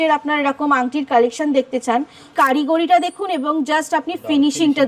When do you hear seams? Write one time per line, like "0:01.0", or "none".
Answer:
0:02.3